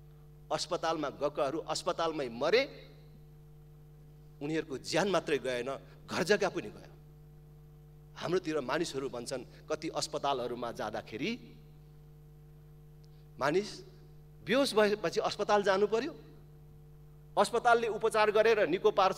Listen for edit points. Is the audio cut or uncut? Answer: uncut